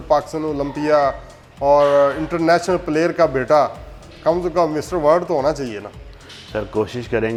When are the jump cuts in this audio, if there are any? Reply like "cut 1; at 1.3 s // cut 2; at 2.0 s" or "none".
none